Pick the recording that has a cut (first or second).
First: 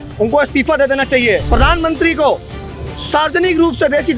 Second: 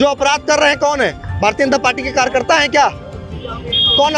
first